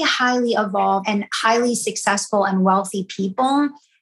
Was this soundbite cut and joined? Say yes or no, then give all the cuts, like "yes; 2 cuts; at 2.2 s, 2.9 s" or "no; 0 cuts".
yes; 1 cut; at 1.0 s